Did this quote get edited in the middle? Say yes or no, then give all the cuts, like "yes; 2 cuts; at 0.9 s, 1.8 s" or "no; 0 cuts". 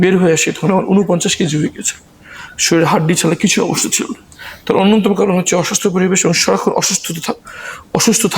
no; 0 cuts